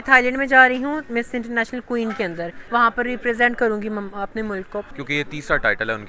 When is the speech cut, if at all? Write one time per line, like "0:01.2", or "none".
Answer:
0:02.6
0:04.9